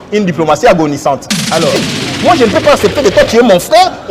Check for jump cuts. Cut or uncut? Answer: cut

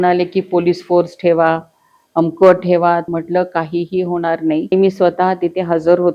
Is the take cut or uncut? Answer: cut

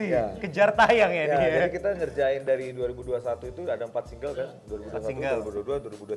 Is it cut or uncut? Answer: uncut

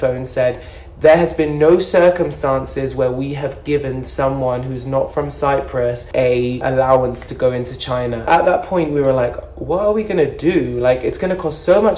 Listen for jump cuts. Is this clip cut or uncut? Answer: cut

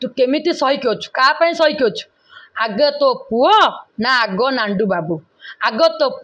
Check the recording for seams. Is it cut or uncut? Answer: uncut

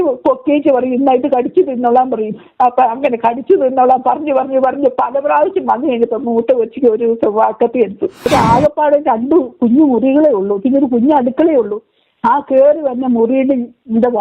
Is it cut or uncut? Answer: cut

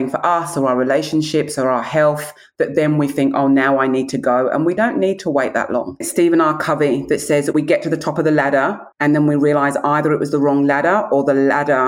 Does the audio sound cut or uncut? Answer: cut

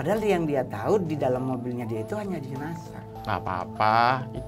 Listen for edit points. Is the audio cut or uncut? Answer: cut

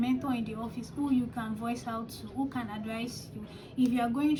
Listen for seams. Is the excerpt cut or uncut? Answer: uncut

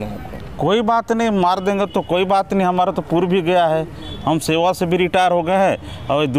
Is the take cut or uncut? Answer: uncut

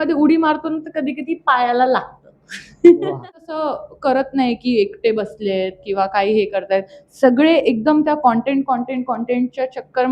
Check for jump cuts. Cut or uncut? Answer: cut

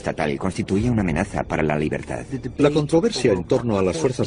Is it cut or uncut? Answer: uncut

